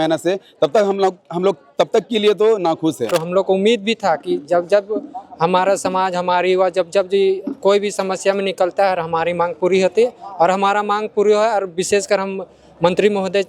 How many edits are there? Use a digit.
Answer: 1